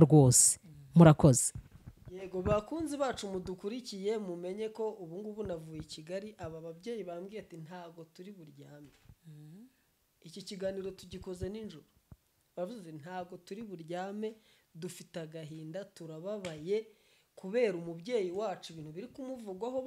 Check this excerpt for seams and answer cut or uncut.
uncut